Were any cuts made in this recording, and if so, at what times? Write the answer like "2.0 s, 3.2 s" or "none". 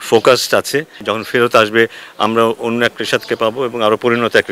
1.1 s